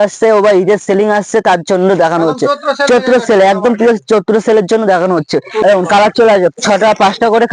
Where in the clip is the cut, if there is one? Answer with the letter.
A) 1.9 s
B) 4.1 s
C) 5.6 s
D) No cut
C